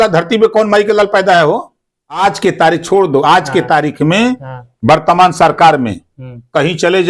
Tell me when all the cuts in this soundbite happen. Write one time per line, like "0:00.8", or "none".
0:02.2